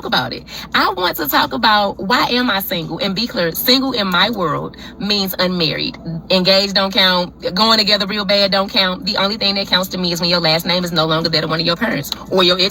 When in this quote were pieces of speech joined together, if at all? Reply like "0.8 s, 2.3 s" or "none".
7.7 s